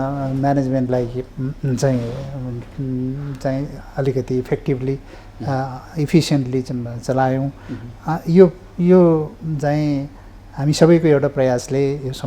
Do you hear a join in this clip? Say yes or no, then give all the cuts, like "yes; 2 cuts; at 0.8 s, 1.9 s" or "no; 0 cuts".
no; 0 cuts